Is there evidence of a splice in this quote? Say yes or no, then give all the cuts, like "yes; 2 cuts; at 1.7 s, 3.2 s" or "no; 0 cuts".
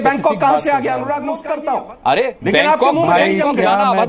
yes; 1 cut; at 1.4 s